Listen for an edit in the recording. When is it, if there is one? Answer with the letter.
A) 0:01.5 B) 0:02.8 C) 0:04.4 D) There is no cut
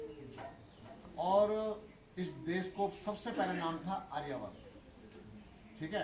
D